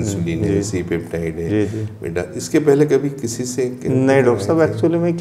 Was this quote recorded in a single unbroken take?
yes; 0 cuts

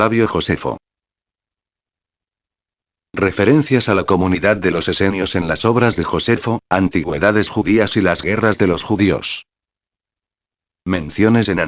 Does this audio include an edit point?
no; 0 cuts

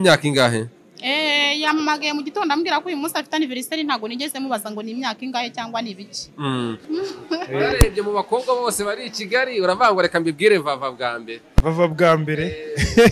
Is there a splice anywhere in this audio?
yes; 1 cut; at 6.9 s

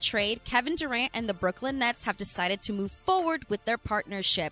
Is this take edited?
no; 0 cuts

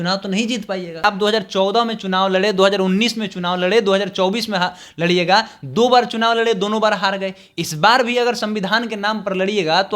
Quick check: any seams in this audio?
yes; 1 cut; at 1.0 s

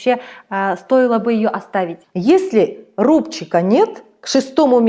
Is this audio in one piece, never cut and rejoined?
no; 1 cut; at 2.0 s

